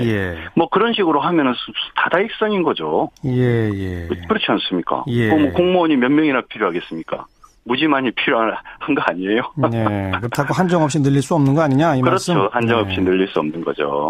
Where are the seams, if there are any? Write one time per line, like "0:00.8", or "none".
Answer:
0:03.3